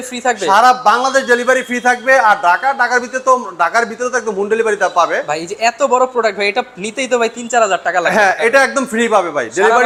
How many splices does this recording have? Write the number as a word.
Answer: zero